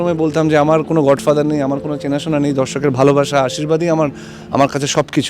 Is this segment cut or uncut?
uncut